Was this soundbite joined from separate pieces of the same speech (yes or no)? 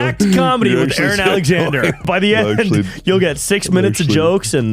yes